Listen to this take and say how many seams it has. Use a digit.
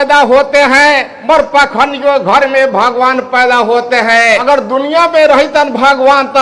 2